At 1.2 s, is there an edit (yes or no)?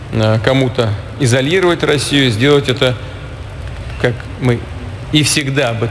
no